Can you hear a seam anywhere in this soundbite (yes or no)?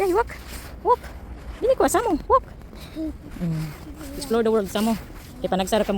no